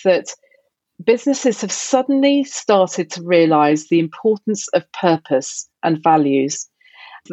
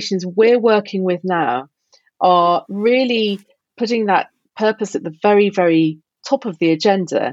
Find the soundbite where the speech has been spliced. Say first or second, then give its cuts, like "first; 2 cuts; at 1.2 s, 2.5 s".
second; 1 cut; at 5.0 s